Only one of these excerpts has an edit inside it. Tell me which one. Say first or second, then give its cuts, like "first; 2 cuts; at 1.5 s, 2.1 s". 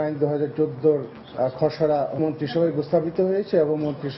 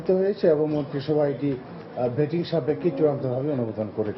first; 2 cuts; at 1.2 s, 2.2 s